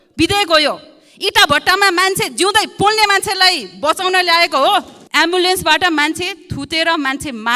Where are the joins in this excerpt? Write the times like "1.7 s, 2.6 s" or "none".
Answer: 5.0 s